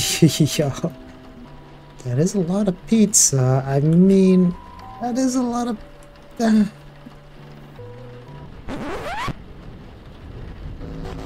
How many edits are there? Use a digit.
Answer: 1